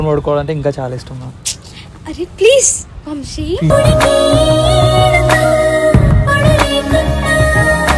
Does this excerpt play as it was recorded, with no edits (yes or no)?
yes